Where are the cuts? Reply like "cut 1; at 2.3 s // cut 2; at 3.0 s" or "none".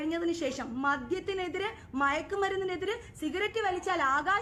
none